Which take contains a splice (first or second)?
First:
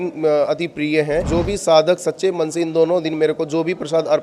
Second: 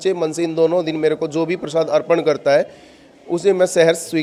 first